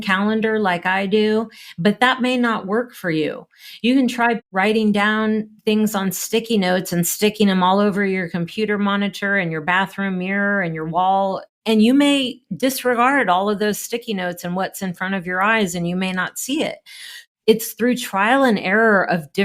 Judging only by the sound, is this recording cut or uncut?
cut